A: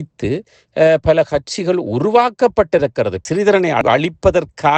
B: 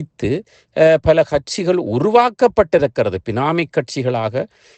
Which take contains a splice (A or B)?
A